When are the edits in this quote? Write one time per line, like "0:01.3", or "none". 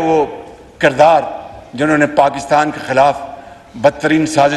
none